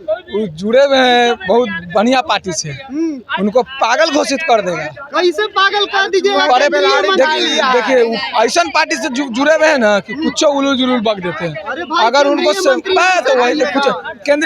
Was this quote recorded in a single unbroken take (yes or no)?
yes